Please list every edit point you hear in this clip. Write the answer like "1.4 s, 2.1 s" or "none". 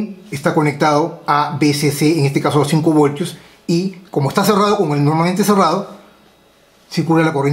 none

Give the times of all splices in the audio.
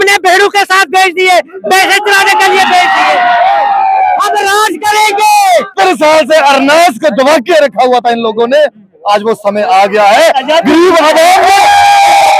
5.7 s

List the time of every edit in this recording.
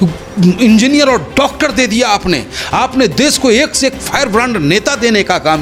none

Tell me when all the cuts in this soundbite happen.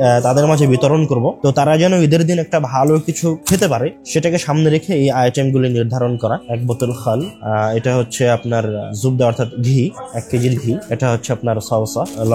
1.3 s, 3.6 s

